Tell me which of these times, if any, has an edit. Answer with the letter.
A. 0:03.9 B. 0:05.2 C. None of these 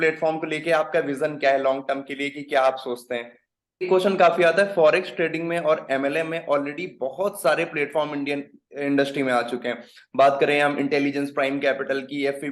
A